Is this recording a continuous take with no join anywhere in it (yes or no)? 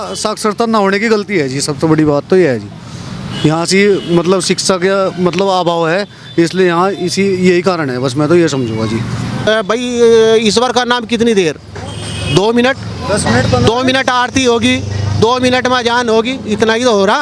no